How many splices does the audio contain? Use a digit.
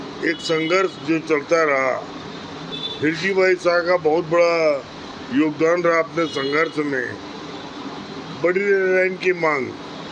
0